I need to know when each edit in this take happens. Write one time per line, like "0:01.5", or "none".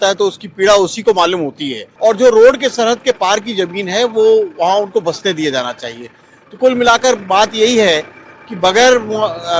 0:01.8

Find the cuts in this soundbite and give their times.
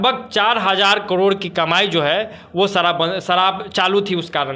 none

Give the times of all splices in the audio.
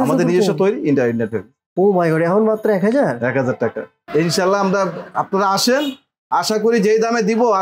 0:04.0

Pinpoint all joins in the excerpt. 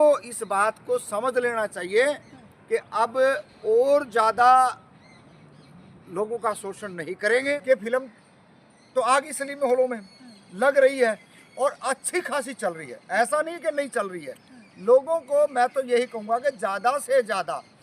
0:07.6

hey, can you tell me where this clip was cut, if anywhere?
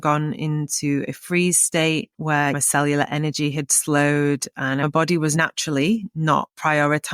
0:02.6
0:04.8

